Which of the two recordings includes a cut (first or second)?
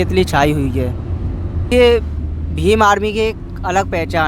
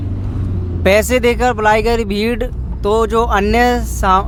first